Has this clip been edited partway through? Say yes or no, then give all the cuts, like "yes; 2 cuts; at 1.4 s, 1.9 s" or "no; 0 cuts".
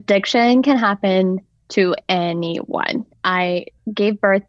yes; 1 cut; at 3.4 s